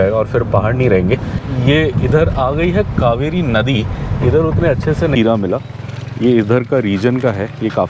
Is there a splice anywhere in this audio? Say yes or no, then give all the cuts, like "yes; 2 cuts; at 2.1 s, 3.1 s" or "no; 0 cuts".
yes; 2 cuts; at 1.4 s, 5.1 s